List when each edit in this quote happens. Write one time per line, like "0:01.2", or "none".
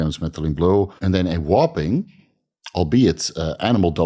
0:01.0